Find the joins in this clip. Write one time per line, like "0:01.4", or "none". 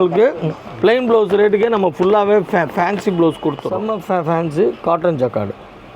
0:03.7